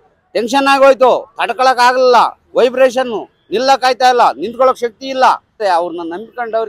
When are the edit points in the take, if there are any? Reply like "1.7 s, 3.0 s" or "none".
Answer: 5.5 s